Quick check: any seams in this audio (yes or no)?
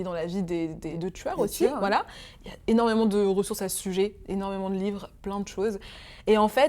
yes